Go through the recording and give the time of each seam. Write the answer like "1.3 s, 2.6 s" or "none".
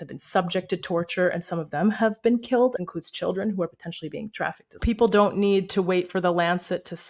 2.7 s, 4.8 s